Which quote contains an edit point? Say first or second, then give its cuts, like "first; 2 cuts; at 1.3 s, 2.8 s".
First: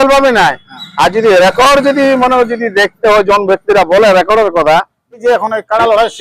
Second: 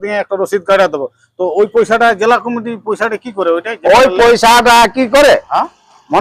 first; 1 cut; at 5.2 s